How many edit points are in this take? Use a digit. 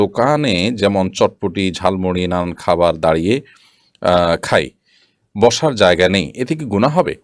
0